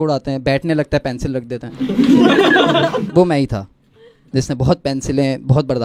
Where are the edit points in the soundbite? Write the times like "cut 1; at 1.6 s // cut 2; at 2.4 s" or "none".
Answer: none

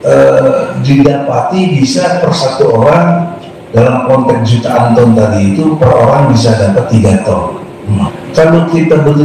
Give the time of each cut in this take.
cut 1; at 8.1 s

